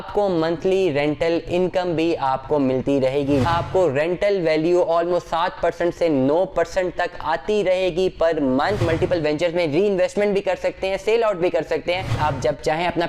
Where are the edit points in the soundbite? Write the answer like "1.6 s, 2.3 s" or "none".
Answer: 3.4 s, 8.8 s, 12.1 s